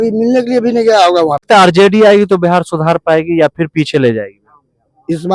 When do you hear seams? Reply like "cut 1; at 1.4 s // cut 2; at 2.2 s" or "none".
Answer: cut 1; at 1.4 s